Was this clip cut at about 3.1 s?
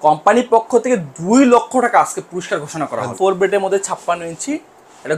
yes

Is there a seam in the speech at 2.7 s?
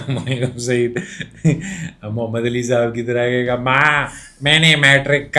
no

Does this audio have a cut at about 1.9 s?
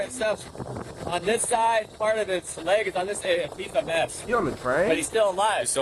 no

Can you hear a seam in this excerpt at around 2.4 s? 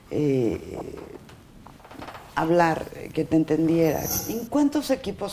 no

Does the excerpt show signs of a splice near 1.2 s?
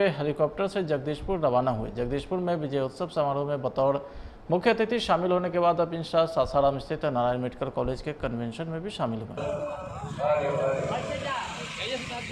no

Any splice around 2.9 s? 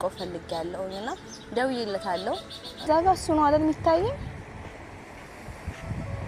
yes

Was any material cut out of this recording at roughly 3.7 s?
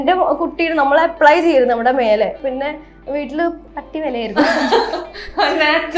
yes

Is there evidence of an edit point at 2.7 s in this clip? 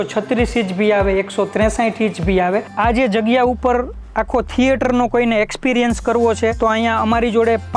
yes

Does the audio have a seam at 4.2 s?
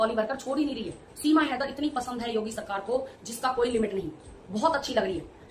no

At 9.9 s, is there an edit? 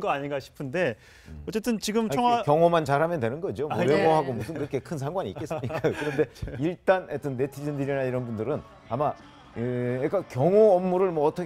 yes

